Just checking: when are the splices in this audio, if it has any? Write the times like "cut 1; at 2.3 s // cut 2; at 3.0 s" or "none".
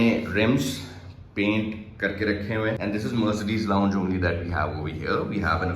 cut 1; at 2.8 s